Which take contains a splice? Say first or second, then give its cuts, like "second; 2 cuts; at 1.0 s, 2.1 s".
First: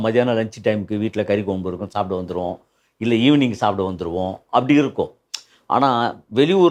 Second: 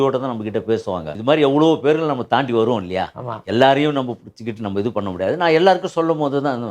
second; 1 cut; at 1.1 s